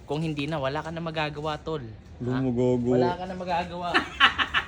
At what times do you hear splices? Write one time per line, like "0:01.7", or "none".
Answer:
none